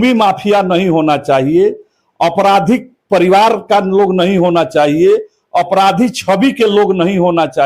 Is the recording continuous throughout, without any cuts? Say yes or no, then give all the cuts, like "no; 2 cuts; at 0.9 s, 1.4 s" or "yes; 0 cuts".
yes; 0 cuts